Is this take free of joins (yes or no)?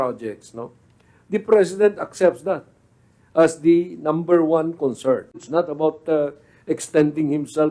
no